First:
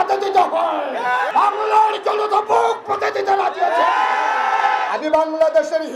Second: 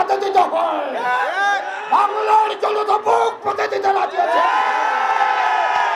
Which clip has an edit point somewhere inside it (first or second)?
first